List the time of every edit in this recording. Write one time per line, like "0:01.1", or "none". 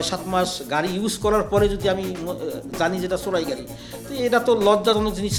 none